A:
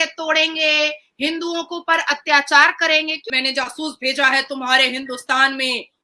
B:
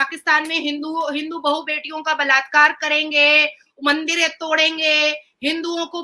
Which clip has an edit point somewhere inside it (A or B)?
A